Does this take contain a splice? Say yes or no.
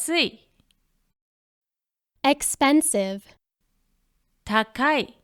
no